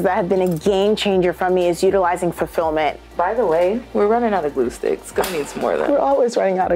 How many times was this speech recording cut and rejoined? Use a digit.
2